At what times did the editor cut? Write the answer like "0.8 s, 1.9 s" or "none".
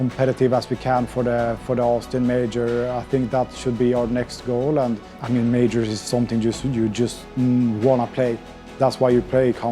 5.1 s